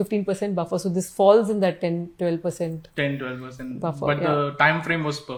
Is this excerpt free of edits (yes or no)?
yes